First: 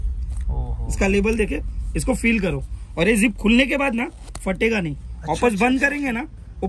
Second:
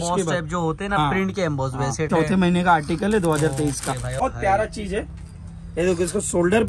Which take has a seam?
second; 2 cuts; at 2.1 s, 4.2 s

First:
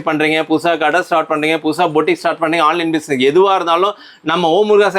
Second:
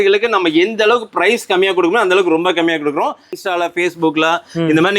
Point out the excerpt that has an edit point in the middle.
second; 1 cut; at 3.3 s

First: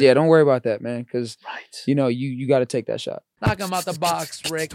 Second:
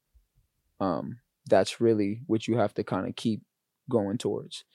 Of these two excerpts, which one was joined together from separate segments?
first; 1 cut; at 3.3 s

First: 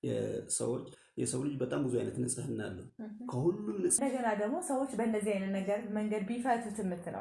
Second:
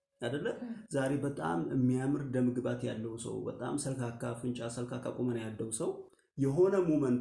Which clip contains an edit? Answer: first; 1 cut; at 4.0 s

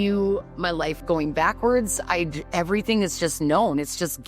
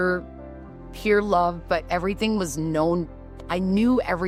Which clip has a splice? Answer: first; 1 cut; at 1.0 s

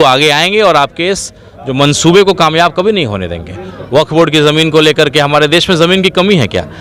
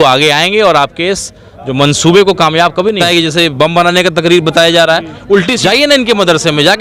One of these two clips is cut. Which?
second; 2 cuts; at 3.0 s, 5.6 s

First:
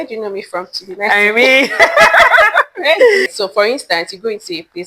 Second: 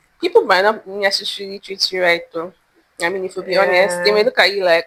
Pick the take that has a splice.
first; 1 cut; at 3.3 s

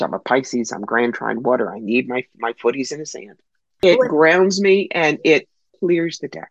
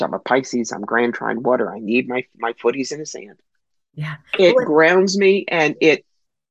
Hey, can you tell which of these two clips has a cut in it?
first; 2 cuts; at 3.8 s, 5.6 s

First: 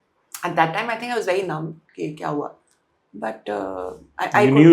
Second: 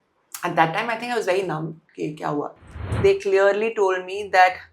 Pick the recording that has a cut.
second; 1 cut; at 2.9 s

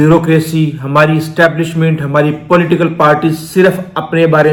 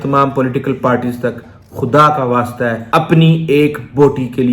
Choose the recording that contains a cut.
second; 1 cut; at 2.8 s

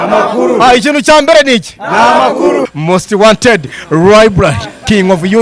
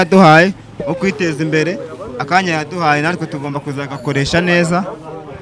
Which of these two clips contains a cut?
first; 1 cut; at 2.7 s

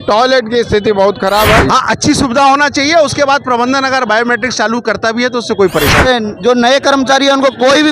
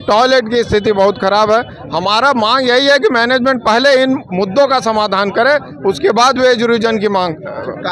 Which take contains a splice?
first; 2 cuts; at 1.6 s, 6.1 s

